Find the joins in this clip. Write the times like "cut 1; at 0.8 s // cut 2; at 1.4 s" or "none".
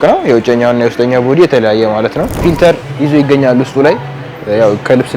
cut 1; at 2.3 s